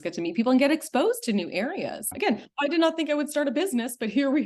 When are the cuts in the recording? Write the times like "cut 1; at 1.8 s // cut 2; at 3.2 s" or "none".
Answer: cut 1; at 2.0 s

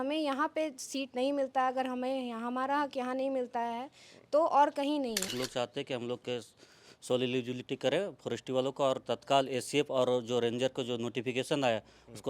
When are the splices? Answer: cut 1; at 5.3 s

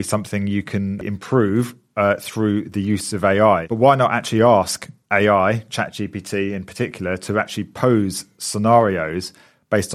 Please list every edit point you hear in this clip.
cut 1; at 1.0 s // cut 2; at 3.7 s

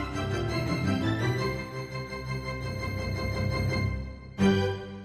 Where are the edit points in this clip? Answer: none

